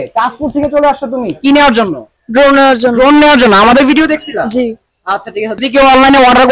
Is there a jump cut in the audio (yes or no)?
yes